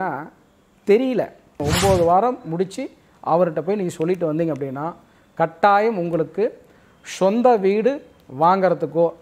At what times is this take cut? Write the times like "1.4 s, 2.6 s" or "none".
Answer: 1.6 s